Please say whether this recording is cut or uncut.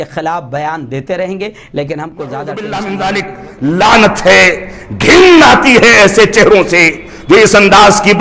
cut